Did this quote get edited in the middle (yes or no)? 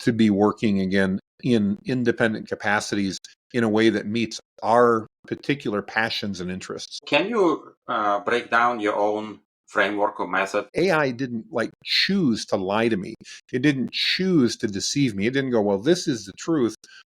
yes